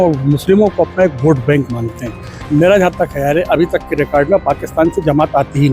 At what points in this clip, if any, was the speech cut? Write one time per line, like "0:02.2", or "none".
0:02.3

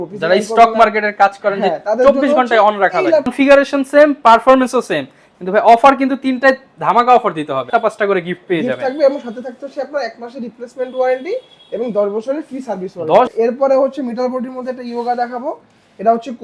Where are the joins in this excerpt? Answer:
0:03.3
0:07.7
0:13.3

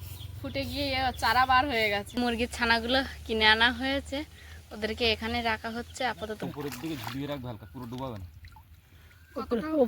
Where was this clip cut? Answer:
0:02.1
0:06.4

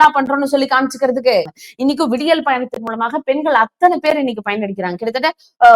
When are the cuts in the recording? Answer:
0:01.5

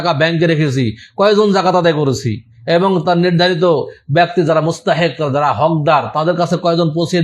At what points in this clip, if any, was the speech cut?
none

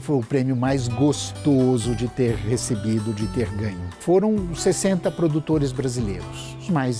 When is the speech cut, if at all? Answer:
none

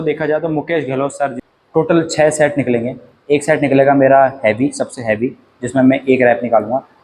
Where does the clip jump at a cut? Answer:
0:01.4

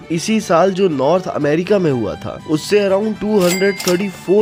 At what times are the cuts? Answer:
none

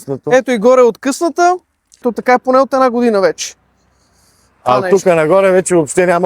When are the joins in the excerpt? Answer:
0:02.1

